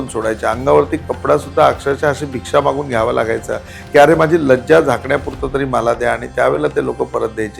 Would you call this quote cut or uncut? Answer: uncut